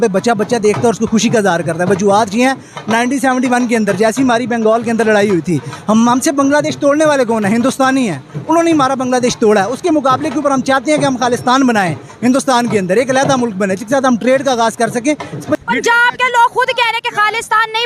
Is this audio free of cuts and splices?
no; 1 cut; at 15.6 s

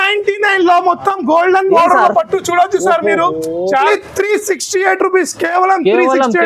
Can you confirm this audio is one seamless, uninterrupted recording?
no; 1 cut; at 3.8 s

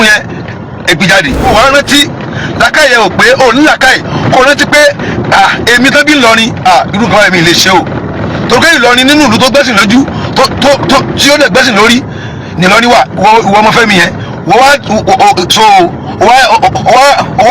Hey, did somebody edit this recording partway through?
yes; 1 cut; at 1.5 s

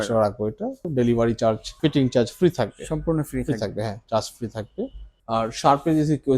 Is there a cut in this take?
yes; 3 cuts; at 0.8 s, 1.7 s, 5.1 s

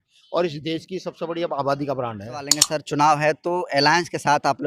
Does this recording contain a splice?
yes; 1 cut; at 2.6 s

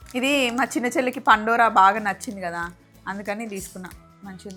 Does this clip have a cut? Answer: no; 0 cuts

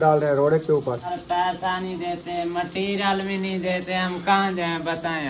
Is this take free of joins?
no; 1 cut; at 1.1 s

